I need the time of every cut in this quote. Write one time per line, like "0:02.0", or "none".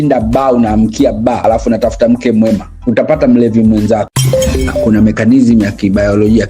0:01.4
0:04.3